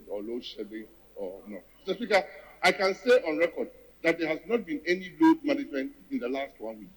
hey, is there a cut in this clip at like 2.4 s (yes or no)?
yes